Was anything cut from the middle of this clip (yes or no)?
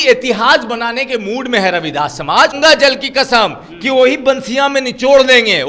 yes